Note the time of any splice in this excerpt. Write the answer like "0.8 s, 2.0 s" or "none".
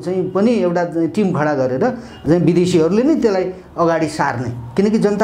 2.2 s